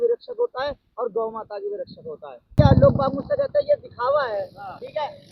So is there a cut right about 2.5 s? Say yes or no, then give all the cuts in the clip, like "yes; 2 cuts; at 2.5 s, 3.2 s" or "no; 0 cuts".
yes; 1 cut; at 2.5 s